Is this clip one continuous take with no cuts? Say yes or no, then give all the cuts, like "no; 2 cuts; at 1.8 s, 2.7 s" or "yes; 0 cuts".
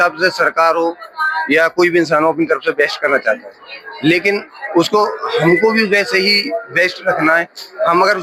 yes; 0 cuts